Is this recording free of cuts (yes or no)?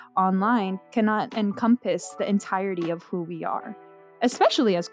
no